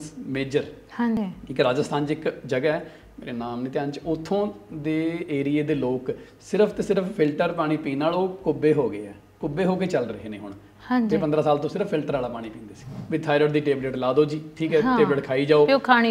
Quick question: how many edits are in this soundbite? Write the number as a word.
two